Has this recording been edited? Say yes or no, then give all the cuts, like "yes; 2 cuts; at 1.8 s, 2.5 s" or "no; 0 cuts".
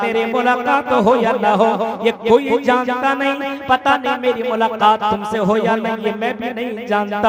no; 0 cuts